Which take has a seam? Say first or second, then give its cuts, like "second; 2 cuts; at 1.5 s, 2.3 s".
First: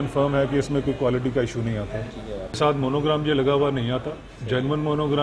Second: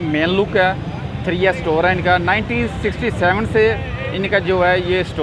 first; 1 cut; at 2.6 s